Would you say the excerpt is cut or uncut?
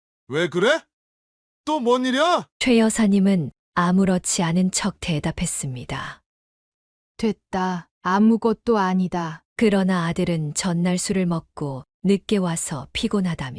uncut